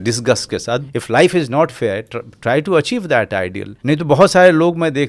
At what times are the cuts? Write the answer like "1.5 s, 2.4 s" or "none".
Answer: 0.9 s, 3.7 s